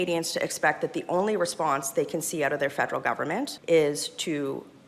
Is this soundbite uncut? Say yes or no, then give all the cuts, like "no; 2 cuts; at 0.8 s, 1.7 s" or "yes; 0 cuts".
no; 1 cut; at 3.6 s